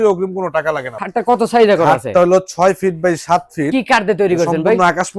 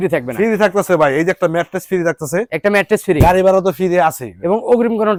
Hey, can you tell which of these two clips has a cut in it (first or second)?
first